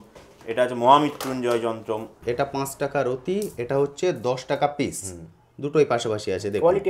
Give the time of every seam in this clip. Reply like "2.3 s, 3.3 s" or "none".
2.1 s